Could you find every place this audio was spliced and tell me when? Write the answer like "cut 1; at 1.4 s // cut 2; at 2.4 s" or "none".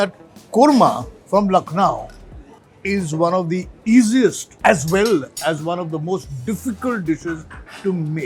cut 1; at 1.1 s // cut 2; at 4.5 s

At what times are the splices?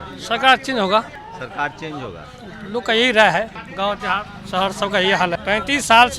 cut 1; at 1.2 s // cut 2; at 3.6 s // cut 3; at 5.4 s

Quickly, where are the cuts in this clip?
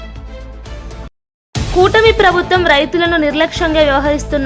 cut 1; at 1.1 s

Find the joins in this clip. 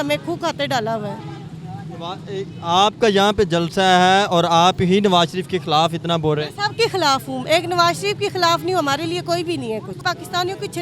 none

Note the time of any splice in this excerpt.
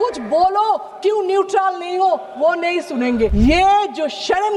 cut 1; at 3.3 s

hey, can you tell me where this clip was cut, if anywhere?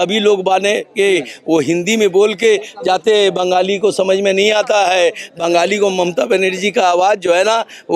none

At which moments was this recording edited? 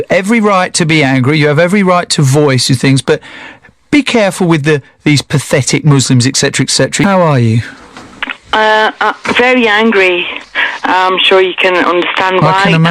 cut 1; at 7.0 s

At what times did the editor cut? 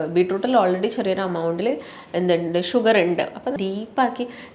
cut 1; at 3.6 s

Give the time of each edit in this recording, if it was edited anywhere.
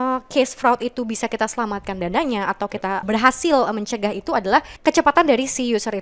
cut 1; at 3.0 s // cut 2; at 4.7 s

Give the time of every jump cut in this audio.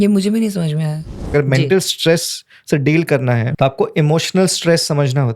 cut 1; at 1.3 s // cut 2; at 3.5 s

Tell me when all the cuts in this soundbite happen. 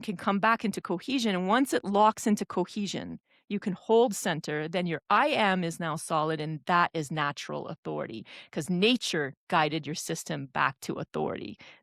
none

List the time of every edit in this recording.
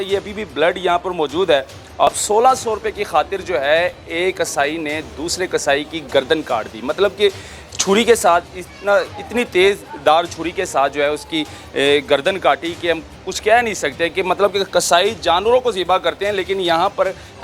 cut 1; at 2.1 s

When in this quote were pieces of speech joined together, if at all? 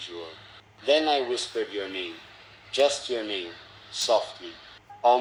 none

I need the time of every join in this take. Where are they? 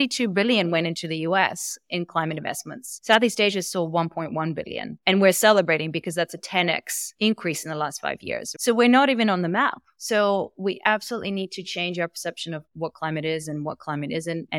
none

